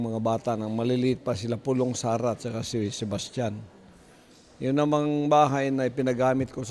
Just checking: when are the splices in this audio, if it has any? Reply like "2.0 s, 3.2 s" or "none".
1.6 s

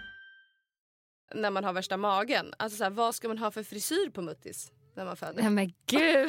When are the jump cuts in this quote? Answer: 1.3 s

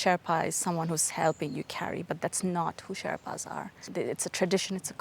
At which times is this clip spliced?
3.8 s

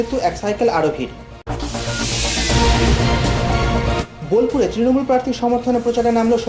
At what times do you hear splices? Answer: 1.3 s, 4.1 s

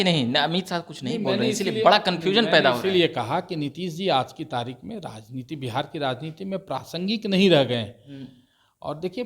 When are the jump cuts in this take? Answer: none

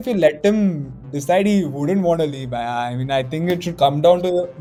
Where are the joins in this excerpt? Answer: none

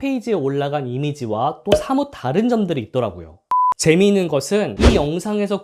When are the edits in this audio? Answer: 3.4 s

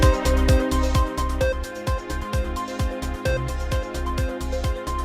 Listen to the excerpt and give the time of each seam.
none

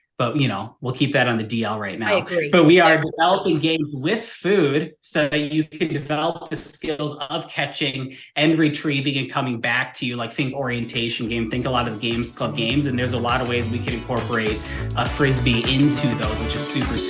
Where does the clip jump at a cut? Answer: none

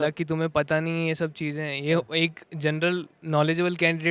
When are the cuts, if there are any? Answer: none

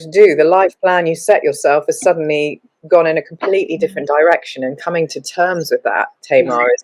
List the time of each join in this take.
none

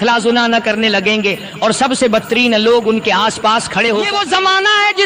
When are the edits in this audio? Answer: 4.1 s

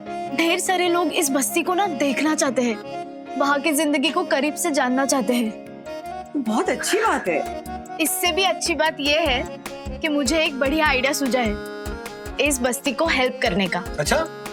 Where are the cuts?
none

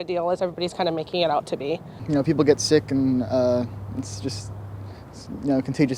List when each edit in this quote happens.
2.0 s

